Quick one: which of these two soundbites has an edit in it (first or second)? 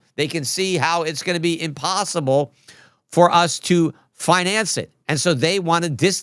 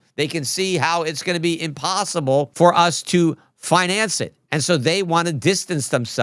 second